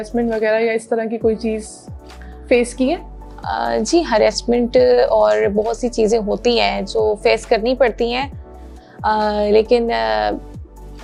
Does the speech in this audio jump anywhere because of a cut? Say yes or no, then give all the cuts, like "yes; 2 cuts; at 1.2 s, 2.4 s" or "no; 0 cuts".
no; 0 cuts